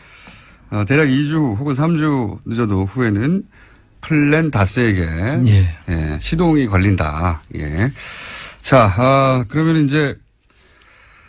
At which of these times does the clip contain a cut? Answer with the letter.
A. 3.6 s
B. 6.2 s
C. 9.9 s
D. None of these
D